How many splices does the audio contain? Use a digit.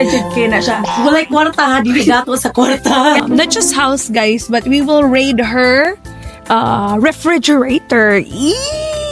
1